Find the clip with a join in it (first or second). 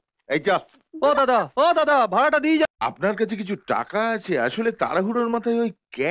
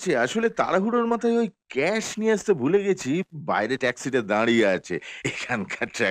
first